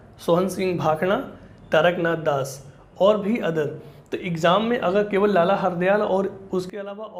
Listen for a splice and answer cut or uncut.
uncut